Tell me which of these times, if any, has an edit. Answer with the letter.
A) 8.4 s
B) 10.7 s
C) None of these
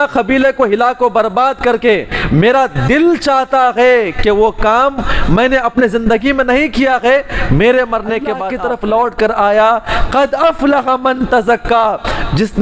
A